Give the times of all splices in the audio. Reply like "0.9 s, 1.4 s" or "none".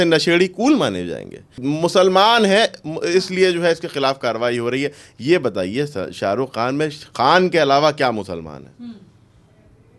1.6 s

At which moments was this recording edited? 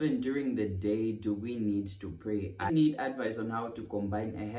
2.6 s

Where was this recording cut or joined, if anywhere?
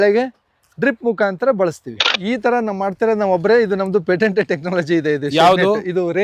2.1 s

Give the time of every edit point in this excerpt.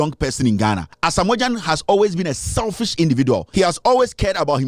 0.9 s, 3.5 s

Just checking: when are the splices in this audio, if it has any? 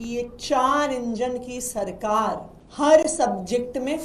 2.6 s

